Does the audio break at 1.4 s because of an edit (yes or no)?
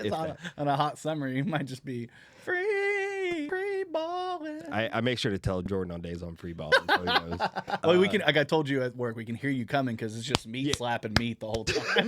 no